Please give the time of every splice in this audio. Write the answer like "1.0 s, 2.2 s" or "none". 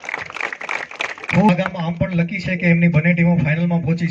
1.5 s